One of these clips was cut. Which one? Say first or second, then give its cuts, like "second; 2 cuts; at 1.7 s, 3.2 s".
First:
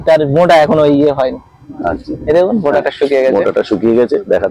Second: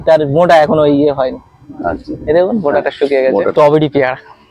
second; 1 cut; at 3.5 s